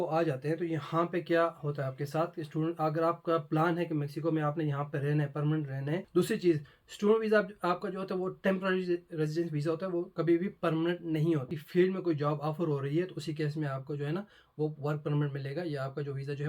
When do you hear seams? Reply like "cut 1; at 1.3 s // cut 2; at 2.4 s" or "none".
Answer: cut 1; at 6.1 s // cut 2; at 11.5 s

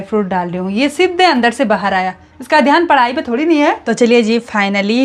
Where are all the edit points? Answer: cut 1; at 3.8 s

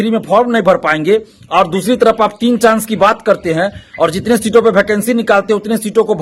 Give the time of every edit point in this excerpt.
none

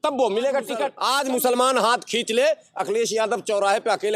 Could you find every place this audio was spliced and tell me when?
cut 1; at 0.9 s

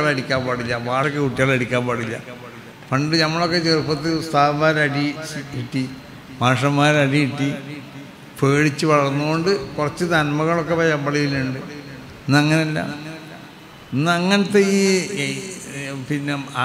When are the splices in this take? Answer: cut 1; at 1.1 s

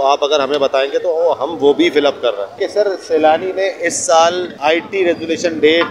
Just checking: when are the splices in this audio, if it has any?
cut 1; at 2.6 s // cut 2; at 4.5 s

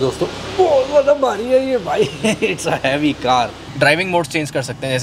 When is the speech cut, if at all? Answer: cut 1; at 3.6 s

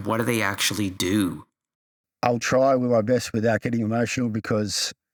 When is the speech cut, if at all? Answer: none

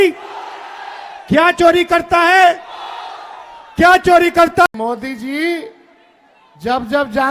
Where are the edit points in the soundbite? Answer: cut 1; at 4.7 s

